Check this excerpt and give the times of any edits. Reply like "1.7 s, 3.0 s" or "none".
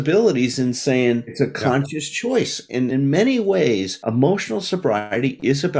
1.3 s, 2.9 s, 3.9 s